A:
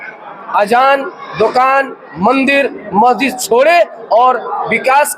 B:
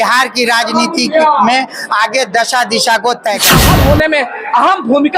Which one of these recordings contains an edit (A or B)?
B